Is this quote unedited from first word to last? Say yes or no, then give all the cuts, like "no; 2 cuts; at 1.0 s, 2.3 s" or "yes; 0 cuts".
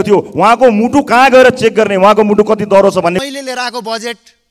no; 1 cut; at 3.2 s